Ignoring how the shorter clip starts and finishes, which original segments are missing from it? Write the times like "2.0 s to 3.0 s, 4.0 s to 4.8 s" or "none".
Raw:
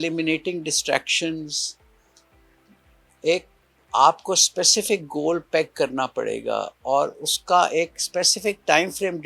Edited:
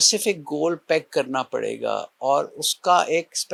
none